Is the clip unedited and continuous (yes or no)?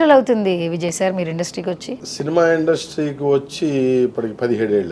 no